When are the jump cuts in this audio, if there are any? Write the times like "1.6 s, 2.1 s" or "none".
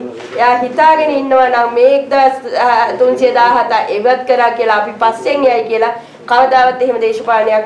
none